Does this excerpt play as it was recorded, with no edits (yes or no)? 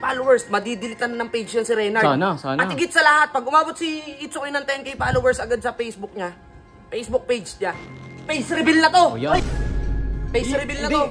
yes